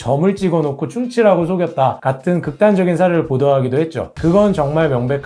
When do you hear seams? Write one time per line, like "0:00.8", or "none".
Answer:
none

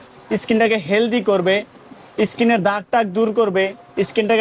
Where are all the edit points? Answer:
none

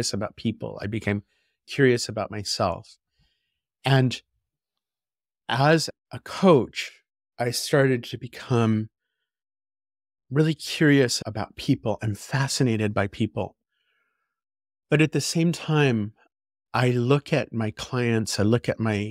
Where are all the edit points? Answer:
none

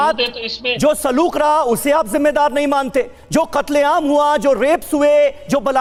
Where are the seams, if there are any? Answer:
none

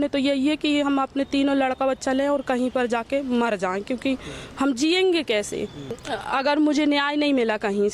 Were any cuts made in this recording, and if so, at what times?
0:06.0

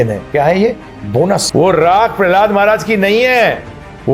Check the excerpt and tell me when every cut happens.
0:01.5

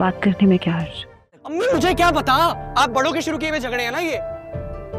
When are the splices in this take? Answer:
0:01.5

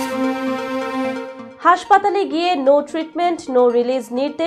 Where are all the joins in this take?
0:01.3

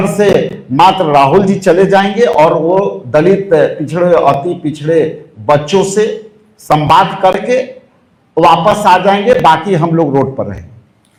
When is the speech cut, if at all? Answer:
none

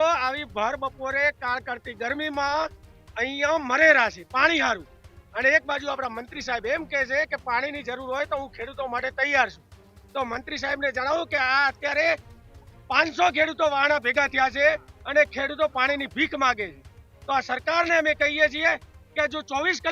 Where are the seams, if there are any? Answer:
none

